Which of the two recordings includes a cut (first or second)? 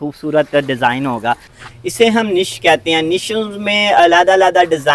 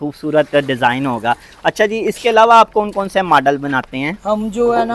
first